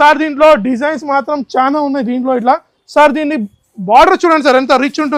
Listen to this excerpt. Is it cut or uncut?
uncut